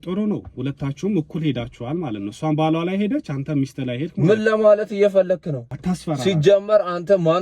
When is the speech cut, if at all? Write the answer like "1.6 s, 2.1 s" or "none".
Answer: 5.7 s